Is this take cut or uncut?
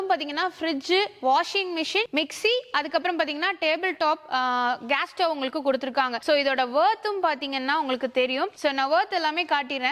uncut